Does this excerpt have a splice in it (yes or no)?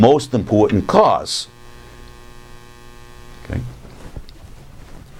yes